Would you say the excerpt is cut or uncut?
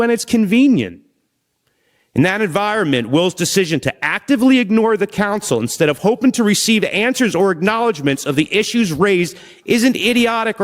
uncut